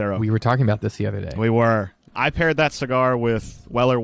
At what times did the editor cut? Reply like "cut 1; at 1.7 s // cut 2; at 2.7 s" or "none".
cut 1; at 2.0 s